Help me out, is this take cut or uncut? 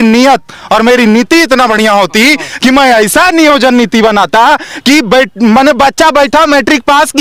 uncut